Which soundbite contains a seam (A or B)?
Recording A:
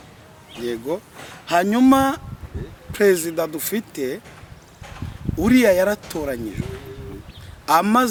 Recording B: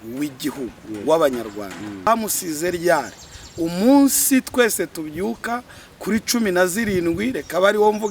B